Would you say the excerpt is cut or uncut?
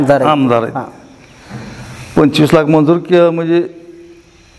uncut